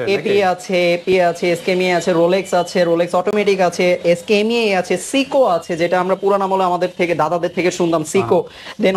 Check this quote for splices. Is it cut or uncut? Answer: uncut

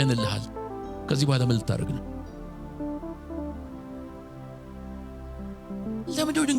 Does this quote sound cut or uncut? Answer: uncut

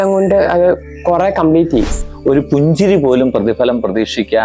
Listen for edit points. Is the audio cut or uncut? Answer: cut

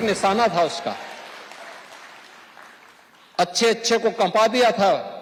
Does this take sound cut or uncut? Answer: uncut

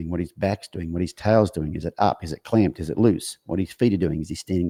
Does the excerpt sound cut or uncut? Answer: uncut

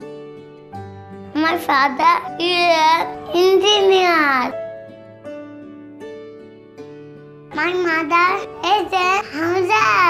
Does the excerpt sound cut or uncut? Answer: uncut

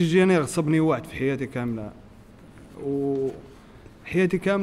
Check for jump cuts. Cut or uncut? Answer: uncut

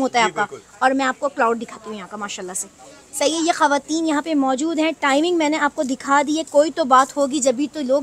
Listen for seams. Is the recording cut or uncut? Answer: uncut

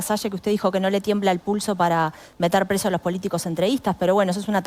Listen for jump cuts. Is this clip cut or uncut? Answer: uncut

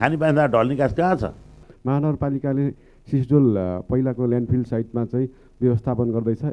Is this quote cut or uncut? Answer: cut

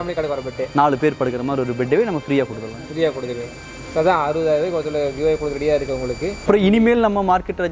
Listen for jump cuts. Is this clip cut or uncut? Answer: cut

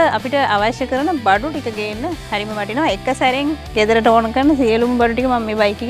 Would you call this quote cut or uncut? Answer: uncut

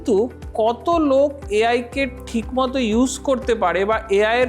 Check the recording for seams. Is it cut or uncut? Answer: uncut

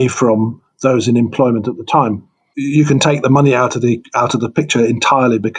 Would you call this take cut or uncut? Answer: uncut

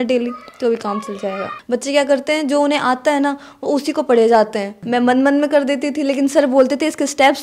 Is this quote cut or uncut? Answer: cut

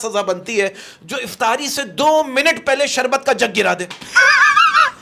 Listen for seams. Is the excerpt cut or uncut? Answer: uncut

